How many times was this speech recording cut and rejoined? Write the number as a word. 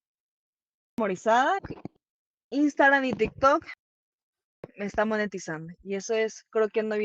one